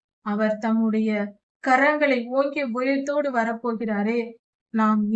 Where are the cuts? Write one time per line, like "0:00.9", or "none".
none